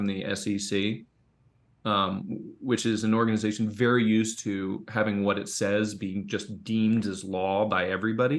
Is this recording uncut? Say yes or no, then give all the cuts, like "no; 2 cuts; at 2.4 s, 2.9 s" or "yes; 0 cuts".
yes; 0 cuts